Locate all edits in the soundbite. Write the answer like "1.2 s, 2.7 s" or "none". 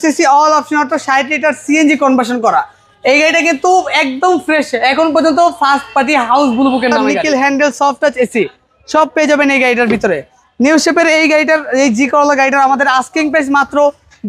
7.2 s